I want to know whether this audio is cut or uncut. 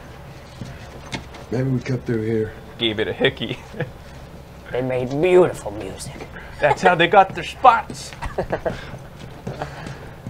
cut